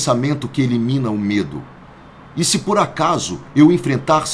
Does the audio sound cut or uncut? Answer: uncut